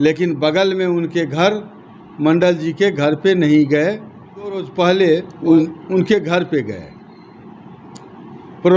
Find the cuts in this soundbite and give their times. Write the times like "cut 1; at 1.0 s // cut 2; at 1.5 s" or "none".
cut 1; at 4.7 s